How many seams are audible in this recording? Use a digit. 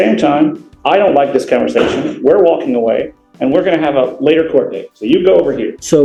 0